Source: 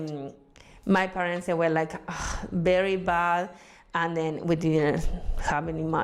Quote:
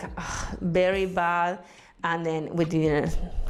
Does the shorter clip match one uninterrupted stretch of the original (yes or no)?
yes